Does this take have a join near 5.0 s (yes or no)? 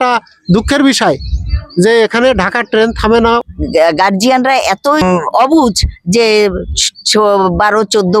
yes